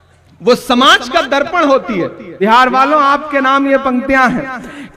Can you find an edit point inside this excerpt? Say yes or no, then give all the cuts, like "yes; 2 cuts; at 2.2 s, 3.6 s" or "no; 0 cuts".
yes; 1 cut; at 2.2 s